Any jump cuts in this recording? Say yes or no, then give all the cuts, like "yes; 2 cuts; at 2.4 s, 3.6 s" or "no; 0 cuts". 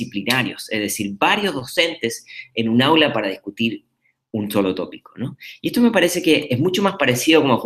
yes; 1 cut; at 3.5 s